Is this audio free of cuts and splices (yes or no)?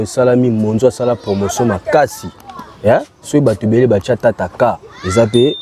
yes